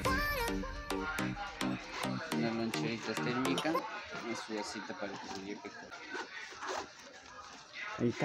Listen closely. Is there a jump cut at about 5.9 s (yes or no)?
yes